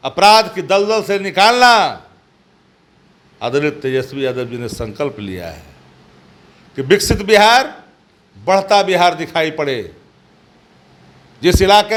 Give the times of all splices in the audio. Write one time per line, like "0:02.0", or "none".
none